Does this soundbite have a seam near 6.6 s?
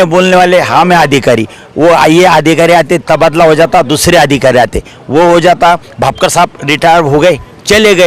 no; 0 cuts

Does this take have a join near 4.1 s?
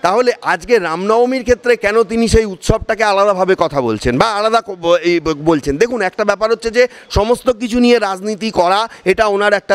no; 0 cuts

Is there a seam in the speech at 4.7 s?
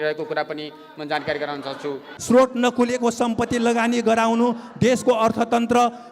no; 1 cut; at 2.1 s

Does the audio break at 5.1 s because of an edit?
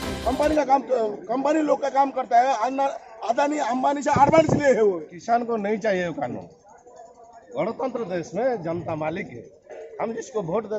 yes; 1 cut; at 5.1 s

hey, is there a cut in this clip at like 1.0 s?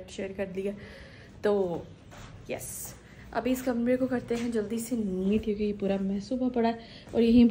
no; 0 cuts

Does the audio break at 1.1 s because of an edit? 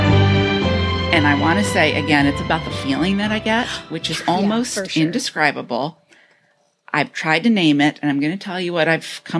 yes; 1 cut; at 1.1 s

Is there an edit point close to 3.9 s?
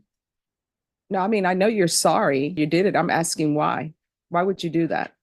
no; 1 cut; at 2.6 s

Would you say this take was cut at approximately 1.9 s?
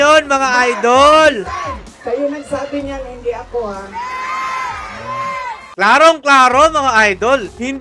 yes; 1 cut; at 1.9 s

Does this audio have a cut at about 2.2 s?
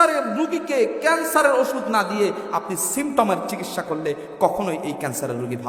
no; 0 cuts

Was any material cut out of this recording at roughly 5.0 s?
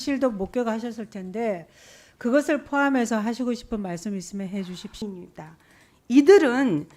yes; 1 cut; at 5.0 s

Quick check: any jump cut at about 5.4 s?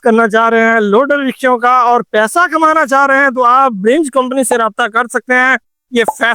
no; 0 cuts

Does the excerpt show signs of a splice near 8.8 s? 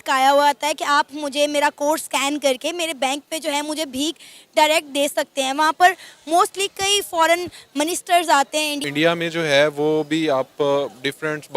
yes; 1 cut; at 8.8 s

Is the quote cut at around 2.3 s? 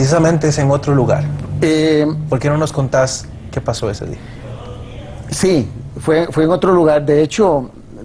yes; 1 cut; at 2.3 s

